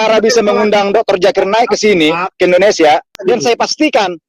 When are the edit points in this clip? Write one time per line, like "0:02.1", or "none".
0:03.1